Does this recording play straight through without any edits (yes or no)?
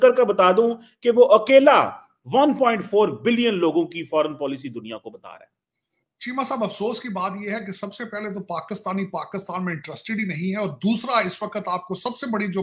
yes